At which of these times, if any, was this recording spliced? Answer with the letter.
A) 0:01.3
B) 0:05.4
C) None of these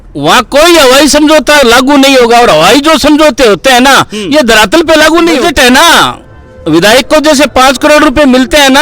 B